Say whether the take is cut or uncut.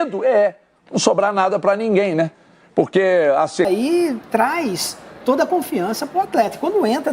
cut